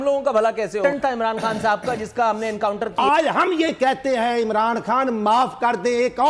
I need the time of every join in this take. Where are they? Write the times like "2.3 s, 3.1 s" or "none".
0.8 s, 2.9 s

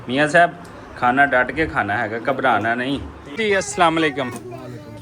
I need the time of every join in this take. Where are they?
3.4 s

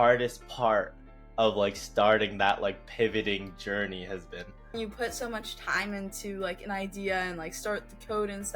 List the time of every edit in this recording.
4.7 s

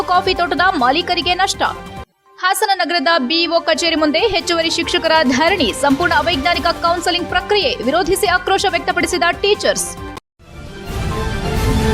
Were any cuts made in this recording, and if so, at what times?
10.1 s

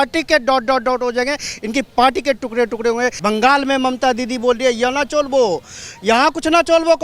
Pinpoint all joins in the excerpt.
3.2 s

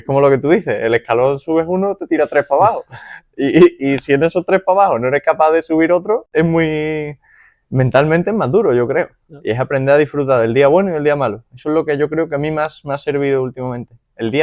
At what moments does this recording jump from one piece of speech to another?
6.3 s

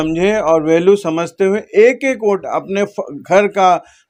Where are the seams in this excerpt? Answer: none

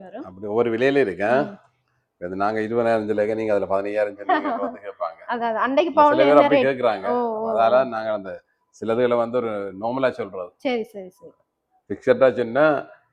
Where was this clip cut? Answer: none

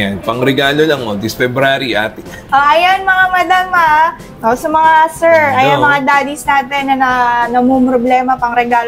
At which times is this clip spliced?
2.3 s

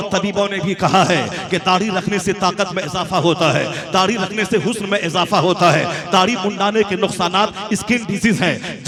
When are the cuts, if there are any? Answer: none

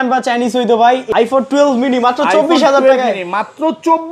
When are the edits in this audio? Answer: 1.0 s

